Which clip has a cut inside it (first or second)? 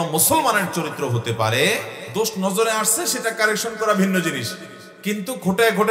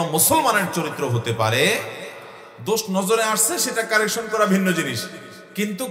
first